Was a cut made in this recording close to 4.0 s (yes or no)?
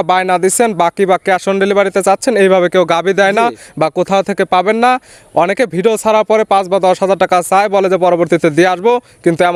no